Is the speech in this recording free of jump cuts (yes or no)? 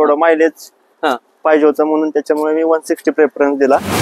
yes